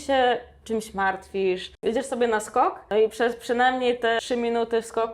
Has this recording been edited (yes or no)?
yes